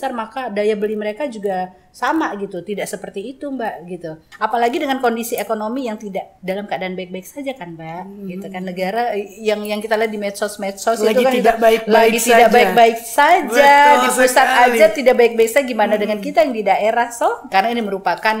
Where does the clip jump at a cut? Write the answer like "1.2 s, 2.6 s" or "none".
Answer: 4.2 s, 6.3 s, 17.5 s

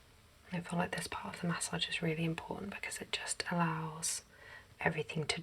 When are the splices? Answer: none

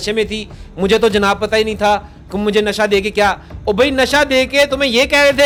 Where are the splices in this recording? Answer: none

